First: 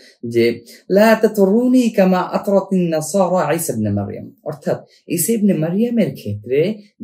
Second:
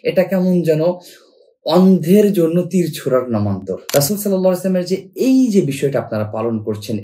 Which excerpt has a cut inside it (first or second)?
second